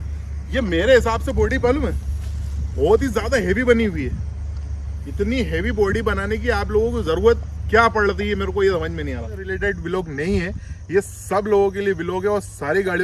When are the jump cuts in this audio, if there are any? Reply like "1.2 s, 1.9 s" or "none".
9.5 s